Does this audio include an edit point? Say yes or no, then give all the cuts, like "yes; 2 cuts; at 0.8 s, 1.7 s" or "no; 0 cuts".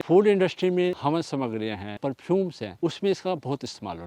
yes; 3 cuts; at 1.0 s, 2.0 s, 2.6 s